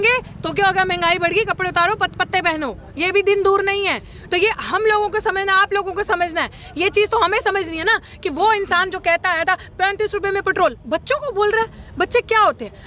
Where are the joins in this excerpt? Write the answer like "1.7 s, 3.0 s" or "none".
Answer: none